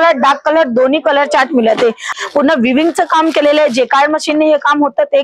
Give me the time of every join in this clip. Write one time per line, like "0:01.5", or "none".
0:02.1

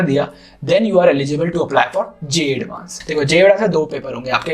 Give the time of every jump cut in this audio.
0:03.0

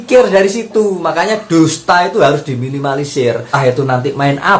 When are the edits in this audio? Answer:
0:03.5

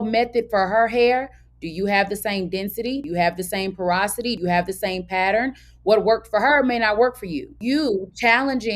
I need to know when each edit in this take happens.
0:03.0
0:04.4
0:07.6

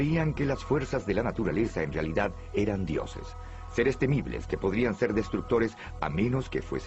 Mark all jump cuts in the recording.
0:00.9

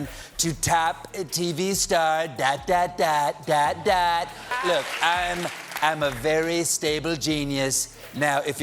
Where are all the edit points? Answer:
0:04.5

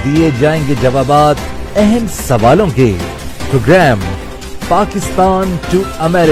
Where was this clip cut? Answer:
none

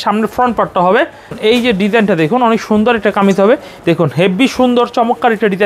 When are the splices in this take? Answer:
0:01.3
0:03.7

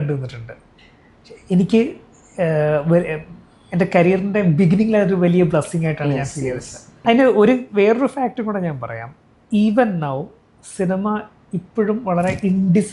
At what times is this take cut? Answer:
0:06.9

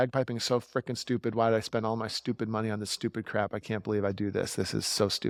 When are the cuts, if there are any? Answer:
none

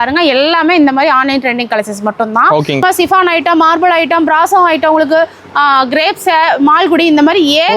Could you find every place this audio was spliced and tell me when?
0:02.8

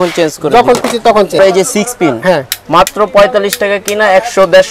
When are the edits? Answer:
0:01.4

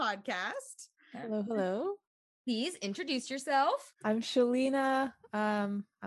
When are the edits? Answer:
0:03.9

